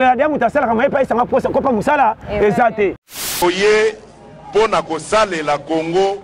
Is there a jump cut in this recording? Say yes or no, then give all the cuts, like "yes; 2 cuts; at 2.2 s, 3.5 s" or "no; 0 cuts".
yes; 1 cut; at 3.2 s